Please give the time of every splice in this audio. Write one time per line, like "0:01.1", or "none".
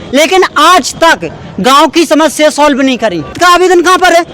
0:03.3